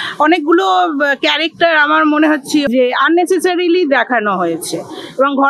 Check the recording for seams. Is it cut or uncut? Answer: cut